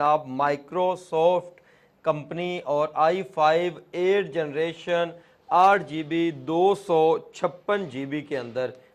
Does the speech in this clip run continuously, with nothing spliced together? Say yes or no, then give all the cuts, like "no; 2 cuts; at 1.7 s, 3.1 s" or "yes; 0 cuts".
yes; 0 cuts